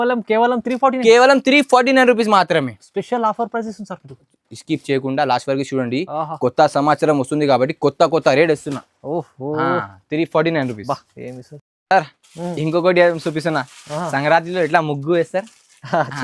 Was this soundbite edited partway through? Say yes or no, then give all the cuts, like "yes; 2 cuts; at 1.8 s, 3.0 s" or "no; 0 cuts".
no; 0 cuts